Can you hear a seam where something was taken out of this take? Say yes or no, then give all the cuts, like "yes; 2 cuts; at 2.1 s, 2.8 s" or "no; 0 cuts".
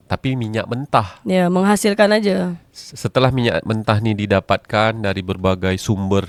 no; 0 cuts